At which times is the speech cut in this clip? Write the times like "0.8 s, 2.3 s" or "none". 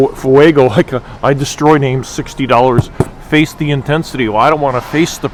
none

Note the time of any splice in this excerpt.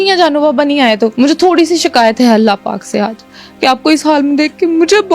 1.1 s

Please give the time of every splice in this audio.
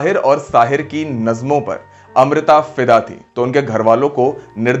3.2 s

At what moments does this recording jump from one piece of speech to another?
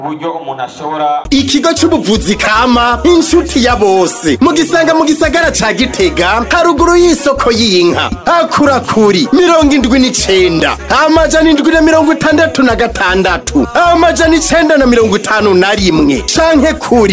1.2 s

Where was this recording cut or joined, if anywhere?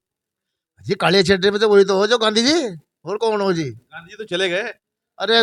none

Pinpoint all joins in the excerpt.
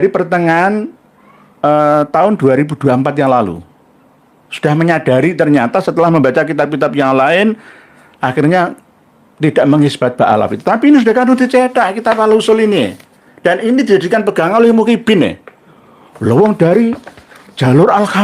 none

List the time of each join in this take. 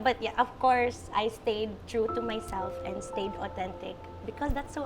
none

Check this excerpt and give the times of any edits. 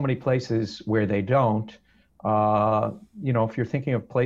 none

